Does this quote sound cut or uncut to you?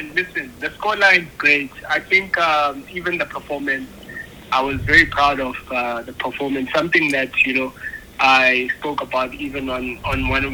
uncut